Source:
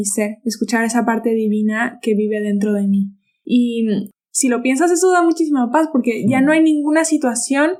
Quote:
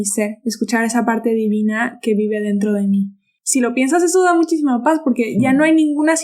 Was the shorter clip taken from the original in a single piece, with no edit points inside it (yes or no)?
no